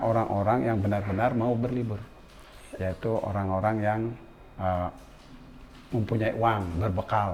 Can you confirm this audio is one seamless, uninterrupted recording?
yes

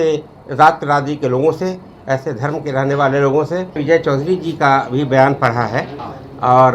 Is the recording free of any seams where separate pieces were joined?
no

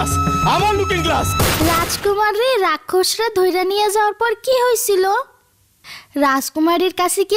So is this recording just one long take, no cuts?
no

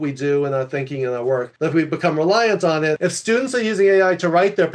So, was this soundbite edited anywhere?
yes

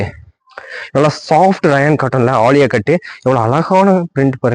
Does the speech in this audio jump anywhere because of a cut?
no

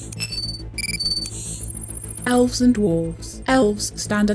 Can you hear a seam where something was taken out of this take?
no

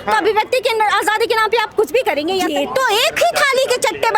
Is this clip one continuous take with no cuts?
no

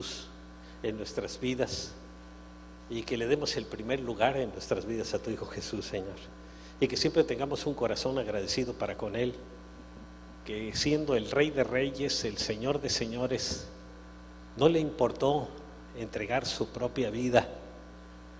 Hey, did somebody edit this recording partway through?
no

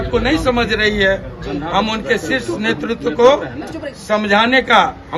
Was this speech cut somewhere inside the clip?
no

